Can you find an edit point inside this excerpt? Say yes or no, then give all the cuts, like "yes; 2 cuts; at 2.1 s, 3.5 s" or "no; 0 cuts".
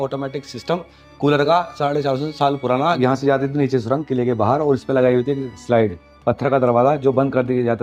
yes; 1 cut; at 3.0 s